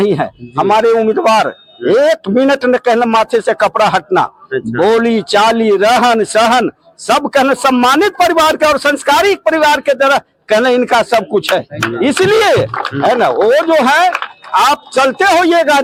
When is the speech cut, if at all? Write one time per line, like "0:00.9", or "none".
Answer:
none

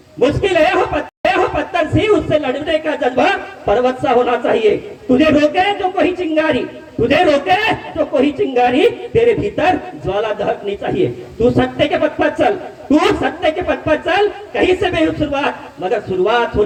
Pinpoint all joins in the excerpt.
none

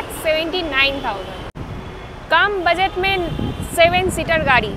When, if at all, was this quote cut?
none

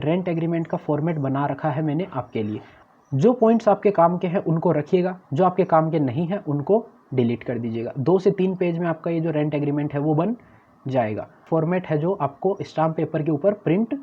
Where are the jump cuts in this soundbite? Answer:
0:02.8
0:11.4

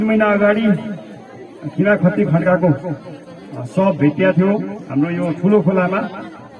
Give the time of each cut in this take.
none

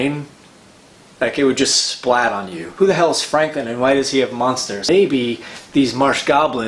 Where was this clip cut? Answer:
0:02.6
0:04.9

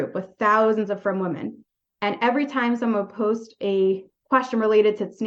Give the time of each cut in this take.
none

